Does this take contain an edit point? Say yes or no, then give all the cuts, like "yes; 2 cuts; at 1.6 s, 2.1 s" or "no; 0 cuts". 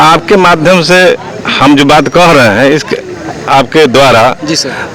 no; 0 cuts